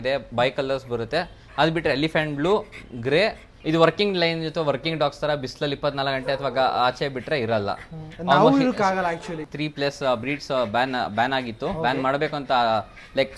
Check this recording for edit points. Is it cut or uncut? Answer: cut